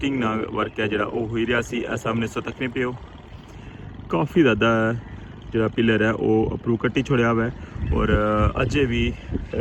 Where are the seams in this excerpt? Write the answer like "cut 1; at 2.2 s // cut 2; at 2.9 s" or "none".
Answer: none